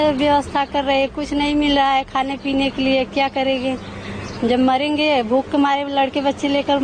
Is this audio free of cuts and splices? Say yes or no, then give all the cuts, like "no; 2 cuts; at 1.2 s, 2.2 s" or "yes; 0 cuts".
yes; 0 cuts